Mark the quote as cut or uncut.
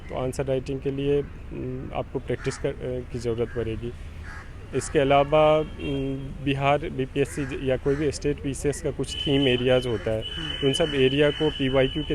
uncut